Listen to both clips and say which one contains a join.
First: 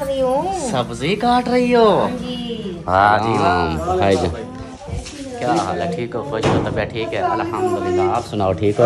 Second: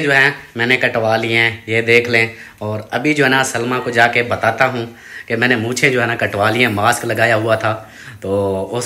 first; 1 cut; at 3.3 s

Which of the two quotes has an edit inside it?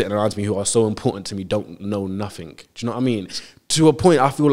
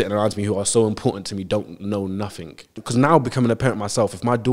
second; 1 cut; at 2.7 s

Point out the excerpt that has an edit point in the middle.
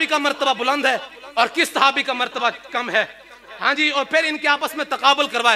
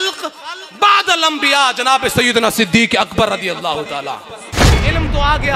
second; 1 cut; at 4.6 s

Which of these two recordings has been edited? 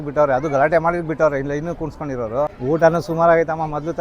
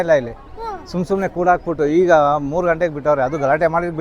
first; 1 cut; at 2.6 s

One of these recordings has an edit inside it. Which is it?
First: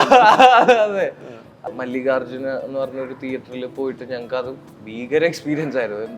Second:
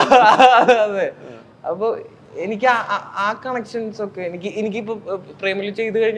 first; 1 cut; at 1.6 s

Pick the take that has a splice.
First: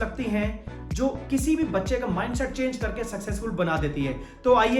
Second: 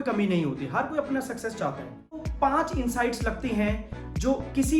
second; 1 cut; at 2.3 s

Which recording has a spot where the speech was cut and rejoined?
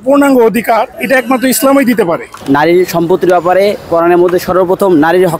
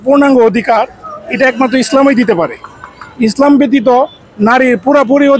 first; 2 cuts; at 1.0 s, 2.4 s

